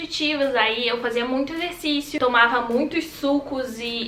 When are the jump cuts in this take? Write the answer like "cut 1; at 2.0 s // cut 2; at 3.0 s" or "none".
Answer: cut 1; at 2.1 s